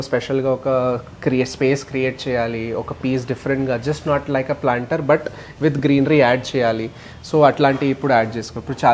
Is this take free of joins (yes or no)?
yes